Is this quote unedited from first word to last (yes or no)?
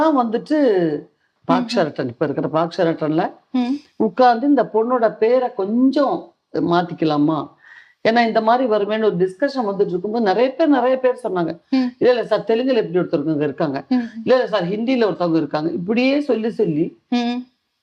no